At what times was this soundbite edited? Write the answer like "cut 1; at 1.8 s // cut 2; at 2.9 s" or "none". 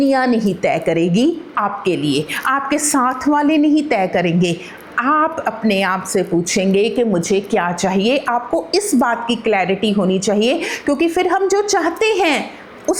none

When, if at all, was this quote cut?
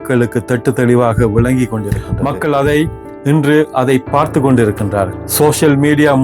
cut 1; at 2.0 s // cut 2; at 5.2 s

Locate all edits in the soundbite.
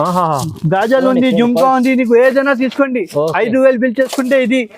none

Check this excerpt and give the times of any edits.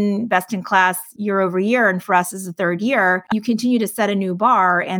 cut 1; at 1.1 s // cut 2; at 3.2 s

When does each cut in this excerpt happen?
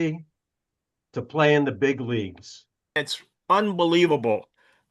cut 1; at 2.9 s

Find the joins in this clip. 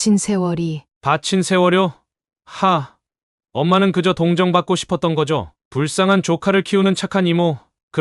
none

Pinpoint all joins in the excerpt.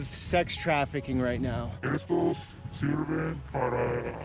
cut 1; at 1.7 s

